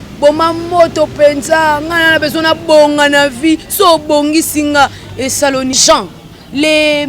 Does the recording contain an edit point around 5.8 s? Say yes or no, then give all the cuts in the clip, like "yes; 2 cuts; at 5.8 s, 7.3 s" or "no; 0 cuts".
yes; 1 cut; at 5.8 s